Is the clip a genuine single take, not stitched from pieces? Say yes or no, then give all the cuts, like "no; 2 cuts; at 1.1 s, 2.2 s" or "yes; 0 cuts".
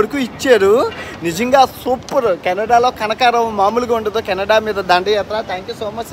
yes; 0 cuts